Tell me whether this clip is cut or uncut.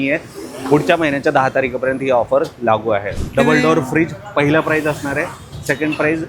cut